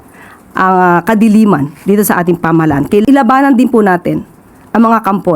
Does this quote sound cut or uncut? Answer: cut